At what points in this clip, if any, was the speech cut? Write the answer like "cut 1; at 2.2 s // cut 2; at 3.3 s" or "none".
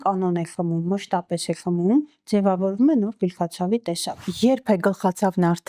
cut 1; at 4.2 s